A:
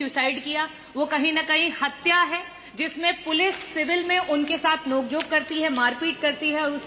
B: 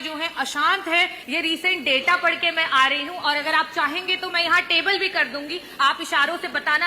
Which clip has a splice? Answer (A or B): B